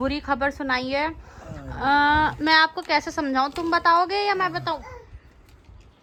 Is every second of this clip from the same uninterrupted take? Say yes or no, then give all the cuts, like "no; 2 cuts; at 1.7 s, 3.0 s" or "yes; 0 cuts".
yes; 0 cuts